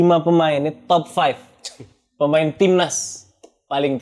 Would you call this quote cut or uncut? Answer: uncut